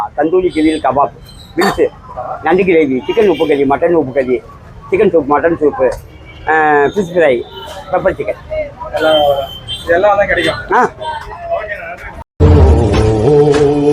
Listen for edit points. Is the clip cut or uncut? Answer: uncut